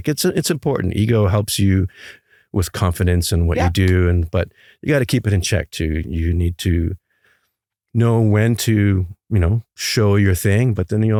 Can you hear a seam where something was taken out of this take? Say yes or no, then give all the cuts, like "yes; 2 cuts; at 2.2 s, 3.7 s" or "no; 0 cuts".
no; 0 cuts